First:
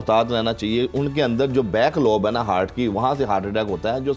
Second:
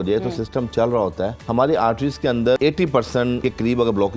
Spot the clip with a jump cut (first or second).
second